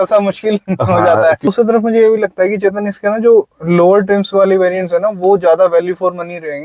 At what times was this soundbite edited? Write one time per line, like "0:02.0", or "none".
0:01.5